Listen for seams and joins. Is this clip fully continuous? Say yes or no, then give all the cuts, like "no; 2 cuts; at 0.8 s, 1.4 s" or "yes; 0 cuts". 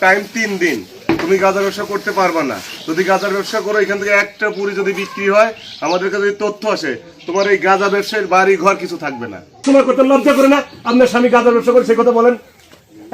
no; 1 cut; at 9.6 s